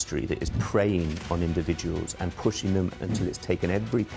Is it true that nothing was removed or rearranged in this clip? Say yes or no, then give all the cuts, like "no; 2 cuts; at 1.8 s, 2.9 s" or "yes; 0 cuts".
no; 1 cut; at 2.9 s